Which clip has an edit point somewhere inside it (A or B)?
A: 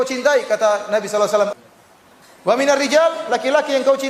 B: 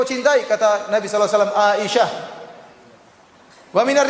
A